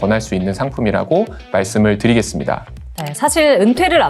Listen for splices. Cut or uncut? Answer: uncut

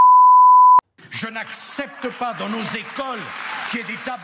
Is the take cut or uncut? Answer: cut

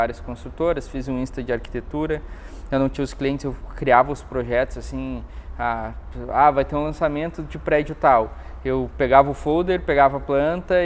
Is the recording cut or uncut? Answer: uncut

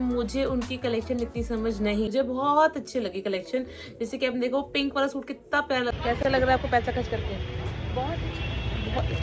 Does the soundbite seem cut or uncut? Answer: cut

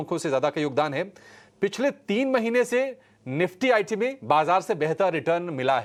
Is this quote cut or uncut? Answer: uncut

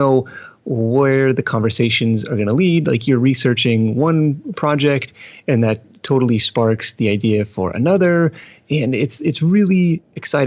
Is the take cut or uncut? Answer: uncut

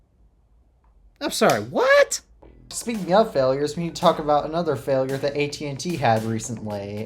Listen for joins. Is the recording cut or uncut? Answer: cut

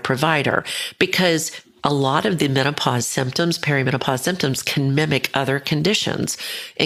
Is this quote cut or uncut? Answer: uncut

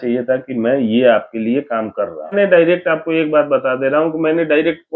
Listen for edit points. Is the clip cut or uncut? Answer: cut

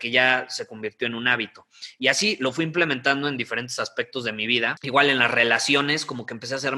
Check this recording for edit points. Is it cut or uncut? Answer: cut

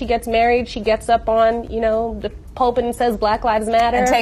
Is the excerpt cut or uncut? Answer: uncut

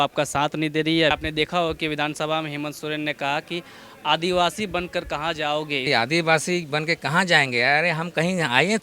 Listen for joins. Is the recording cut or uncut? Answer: cut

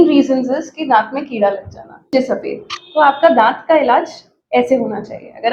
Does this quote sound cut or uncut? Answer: cut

